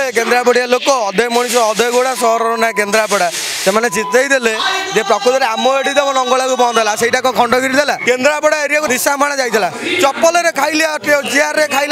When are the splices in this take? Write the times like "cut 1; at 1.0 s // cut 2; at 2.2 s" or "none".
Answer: cut 1; at 8.0 s // cut 2; at 8.9 s

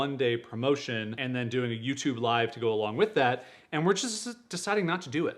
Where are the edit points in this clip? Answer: cut 1; at 1.2 s

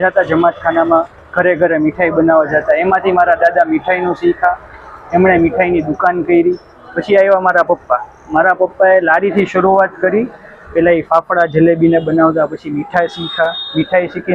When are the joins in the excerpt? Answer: none

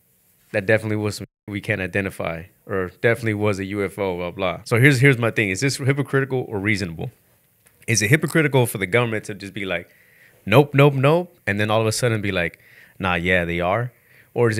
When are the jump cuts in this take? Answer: cut 1; at 4.6 s

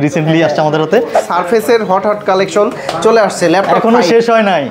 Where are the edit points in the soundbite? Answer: cut 1; at 1.2 s

